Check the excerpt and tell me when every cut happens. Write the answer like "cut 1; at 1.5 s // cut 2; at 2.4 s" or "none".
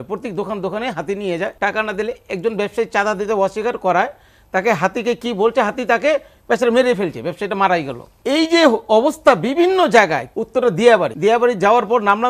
cut 1; at 1.5 s // cut 2; at 8.0 s // cut 3; at 10.3 s // cut 4; at 11.1 s